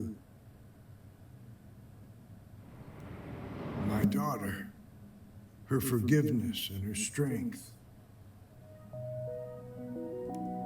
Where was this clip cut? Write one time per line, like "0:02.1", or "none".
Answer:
0:02.0